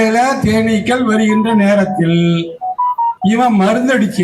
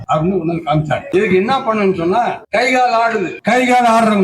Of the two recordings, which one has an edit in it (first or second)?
second